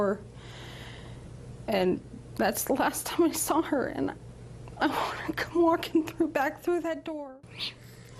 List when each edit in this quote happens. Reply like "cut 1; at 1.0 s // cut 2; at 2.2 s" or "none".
cut 1; at 7.2 s

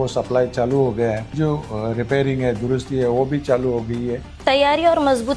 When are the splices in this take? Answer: cut 1; at 1.3 s // cut 2; at 4.3 s

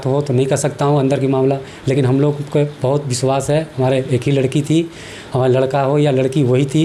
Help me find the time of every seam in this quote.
none

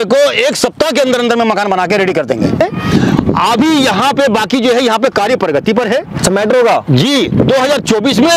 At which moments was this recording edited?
cut 1; at 2.6 s

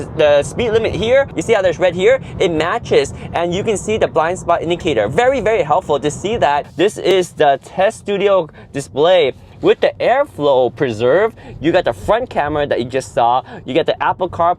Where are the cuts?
cut 1; at 1.4 s // cut 2; at 6.7 s

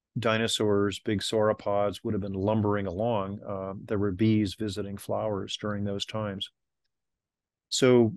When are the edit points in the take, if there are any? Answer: none

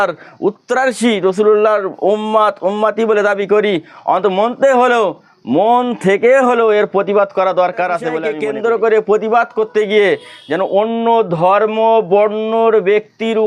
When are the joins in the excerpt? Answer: cut 1; at 8.3 s

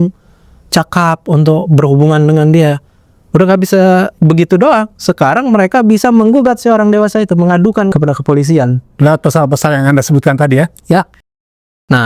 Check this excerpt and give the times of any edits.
cut 1; at 7.9 s

